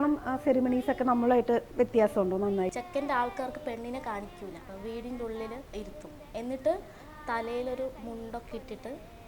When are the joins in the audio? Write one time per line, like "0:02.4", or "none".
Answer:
0:02.7
0:04.7
0:05.7